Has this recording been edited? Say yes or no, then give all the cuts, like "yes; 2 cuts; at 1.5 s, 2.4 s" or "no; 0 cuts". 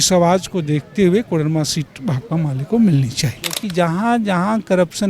yes; 1 cut; at 3.6 s